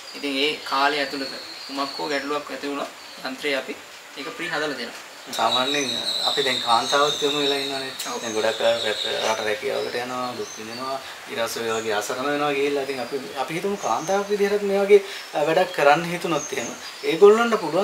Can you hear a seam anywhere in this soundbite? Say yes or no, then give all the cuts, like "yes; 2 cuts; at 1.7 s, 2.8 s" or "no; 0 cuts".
yes; 1 cut; at 5.3 s